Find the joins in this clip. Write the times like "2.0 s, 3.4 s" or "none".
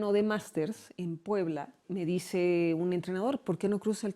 1.8 s